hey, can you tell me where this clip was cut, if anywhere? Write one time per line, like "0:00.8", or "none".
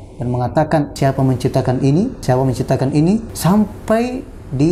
0:00.9
0:02.2
0:03.3